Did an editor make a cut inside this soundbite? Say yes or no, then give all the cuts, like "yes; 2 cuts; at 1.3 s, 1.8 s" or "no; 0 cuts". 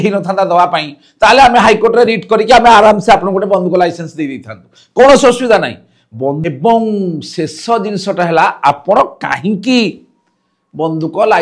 yes; 1 cut; at 6.4 s